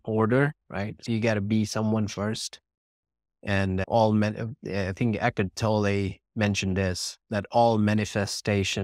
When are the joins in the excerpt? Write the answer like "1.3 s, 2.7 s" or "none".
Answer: 1.0 s